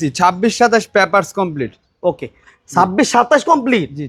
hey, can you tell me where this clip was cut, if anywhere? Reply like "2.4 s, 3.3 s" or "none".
none